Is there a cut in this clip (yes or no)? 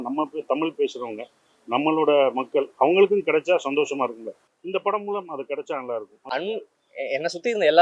yes